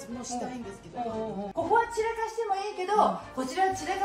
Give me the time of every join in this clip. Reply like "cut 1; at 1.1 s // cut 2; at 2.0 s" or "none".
cut 1; at 1.5 s